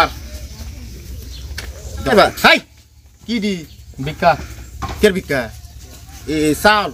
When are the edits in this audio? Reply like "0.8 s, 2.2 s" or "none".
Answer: 2.1 s